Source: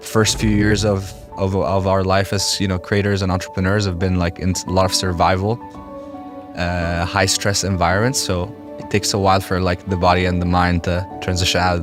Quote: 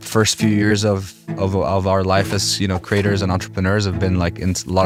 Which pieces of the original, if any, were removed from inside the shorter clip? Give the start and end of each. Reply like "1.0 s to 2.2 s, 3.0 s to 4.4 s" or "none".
none